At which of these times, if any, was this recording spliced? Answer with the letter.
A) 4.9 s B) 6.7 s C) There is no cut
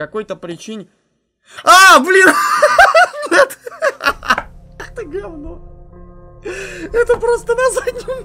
A